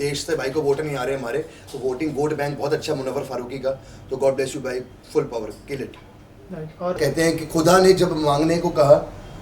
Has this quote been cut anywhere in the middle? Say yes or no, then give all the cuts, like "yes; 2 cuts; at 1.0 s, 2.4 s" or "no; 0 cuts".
yes; 1 cut; at 7.0 s